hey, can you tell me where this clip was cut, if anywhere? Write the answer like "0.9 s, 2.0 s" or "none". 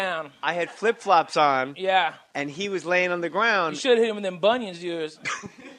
1.0 s

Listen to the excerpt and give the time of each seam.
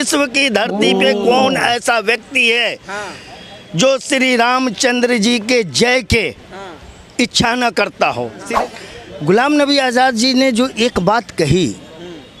8.4 s

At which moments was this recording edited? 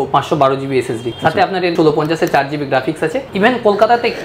1.6 s, 3.2 s

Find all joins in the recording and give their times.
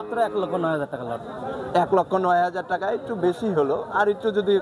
none

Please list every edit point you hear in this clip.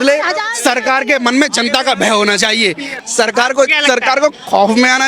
2.9 s

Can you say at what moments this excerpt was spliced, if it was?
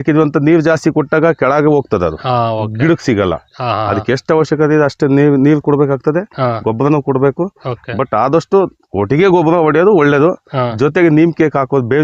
none

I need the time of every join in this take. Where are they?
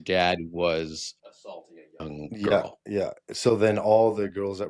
none

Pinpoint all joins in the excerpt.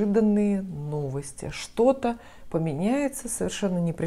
none

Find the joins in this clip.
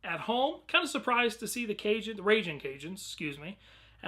2.1 s

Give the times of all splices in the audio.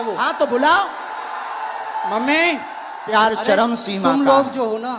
3.1 s

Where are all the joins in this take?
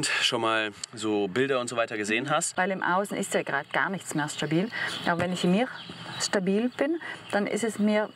2.5 s

